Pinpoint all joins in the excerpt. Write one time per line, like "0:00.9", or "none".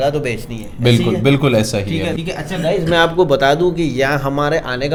none